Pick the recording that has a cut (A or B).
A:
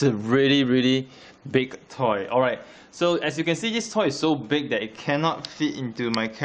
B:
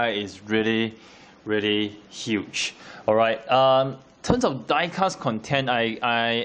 A